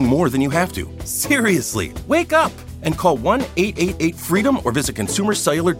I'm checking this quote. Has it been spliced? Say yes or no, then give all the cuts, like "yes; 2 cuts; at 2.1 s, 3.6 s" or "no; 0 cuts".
no; 0 cuts